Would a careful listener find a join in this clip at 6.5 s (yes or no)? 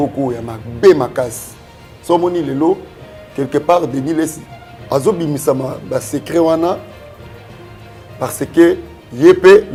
no